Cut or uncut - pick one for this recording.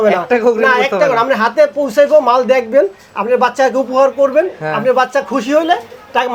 uncut